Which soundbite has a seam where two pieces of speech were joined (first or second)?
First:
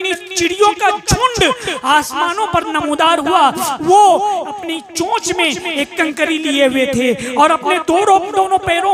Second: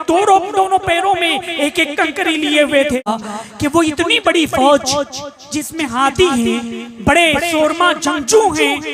second